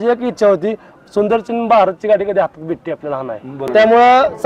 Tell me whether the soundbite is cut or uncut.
cut